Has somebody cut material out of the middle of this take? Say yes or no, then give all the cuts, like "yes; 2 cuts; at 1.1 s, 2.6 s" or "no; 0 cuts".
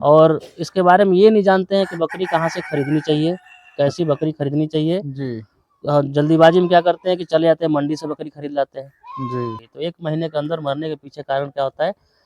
yes; 1 cut; at 9.6 s